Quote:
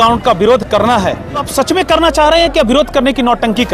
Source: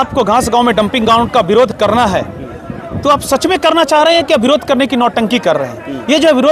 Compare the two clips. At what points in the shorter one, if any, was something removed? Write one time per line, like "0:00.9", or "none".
0:01.5

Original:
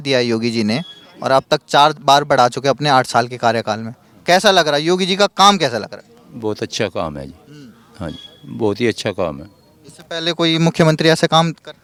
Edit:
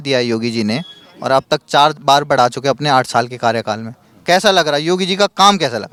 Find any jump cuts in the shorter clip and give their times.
none

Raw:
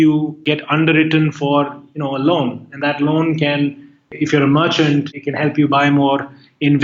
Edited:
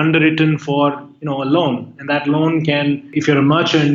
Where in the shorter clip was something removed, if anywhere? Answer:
0:03.1

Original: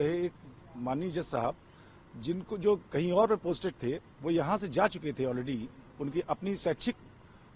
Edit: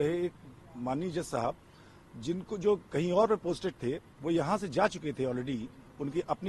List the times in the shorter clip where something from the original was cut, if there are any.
none

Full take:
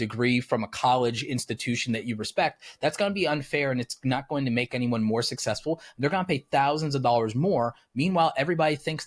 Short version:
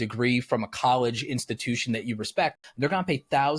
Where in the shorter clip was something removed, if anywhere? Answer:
0:02.7

